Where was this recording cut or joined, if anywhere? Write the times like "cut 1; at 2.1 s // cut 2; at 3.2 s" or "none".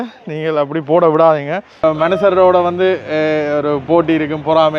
cut 1; at 1.8 s